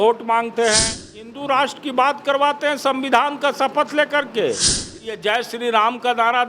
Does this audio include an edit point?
yes; 2 cuts; at 1.3 s, 5.0 s

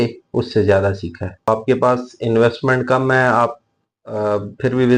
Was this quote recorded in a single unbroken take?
no; 1 cut; at 1.5 s

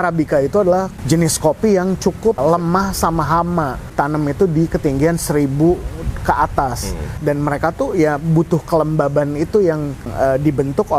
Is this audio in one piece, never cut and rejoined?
no; 4 cuts; at 1.0 s, 2.4 s, 3.9 s, 7.2 s

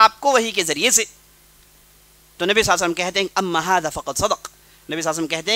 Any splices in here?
no; 0 cuts

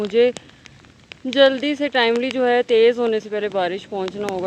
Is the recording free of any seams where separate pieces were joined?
yes; 0 cuts

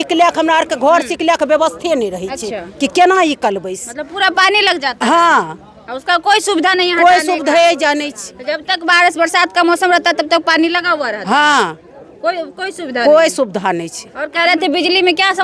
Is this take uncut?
yes; 0 cuts

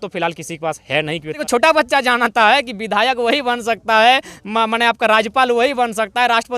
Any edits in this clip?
yes; 1 cut; at 1.4 s

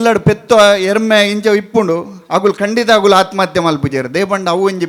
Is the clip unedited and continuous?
yes; 0 cuts

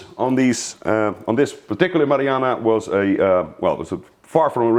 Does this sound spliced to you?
no; 0 cuts

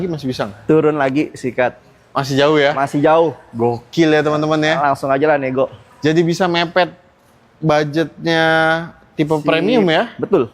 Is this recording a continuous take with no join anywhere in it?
yes; 0 cuts

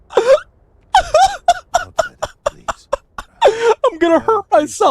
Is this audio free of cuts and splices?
no; 1 cut; at 3.2 s

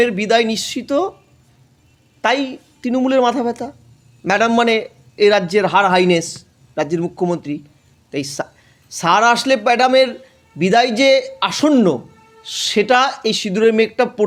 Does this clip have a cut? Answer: no; 0 cuts

